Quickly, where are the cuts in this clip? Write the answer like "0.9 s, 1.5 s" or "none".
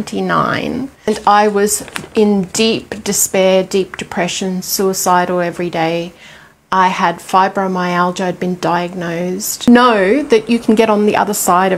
1.1 s, 9.5 s

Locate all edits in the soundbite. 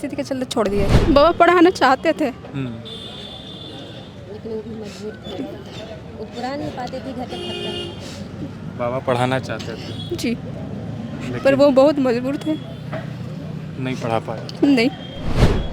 1.0 s

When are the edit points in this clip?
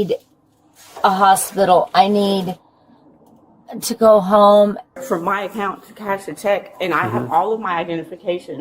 5.0 s

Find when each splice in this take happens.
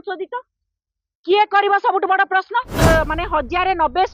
2.7 s

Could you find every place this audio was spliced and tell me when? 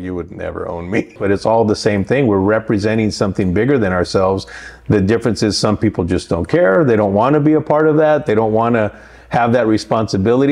1.2 s

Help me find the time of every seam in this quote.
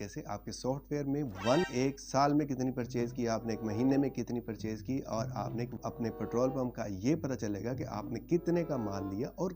1.7 s, 5.8 s

